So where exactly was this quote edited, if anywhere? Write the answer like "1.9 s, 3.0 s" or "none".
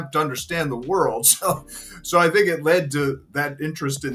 none